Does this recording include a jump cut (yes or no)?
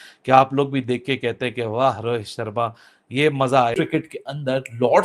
yes